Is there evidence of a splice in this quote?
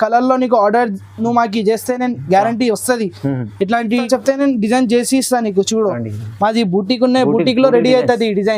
yes; 1 cut; at 4.0 s

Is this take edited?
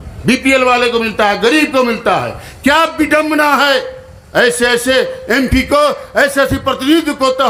no; 0 cuts

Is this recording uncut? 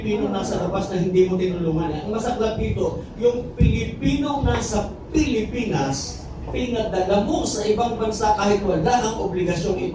yes; 0 cuts

